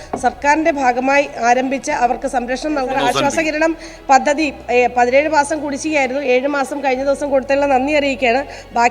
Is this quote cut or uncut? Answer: cut